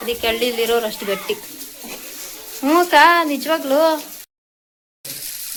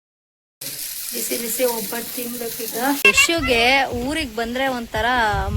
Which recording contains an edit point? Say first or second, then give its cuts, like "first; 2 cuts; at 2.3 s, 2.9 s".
second; 1 cut; at 2.9 s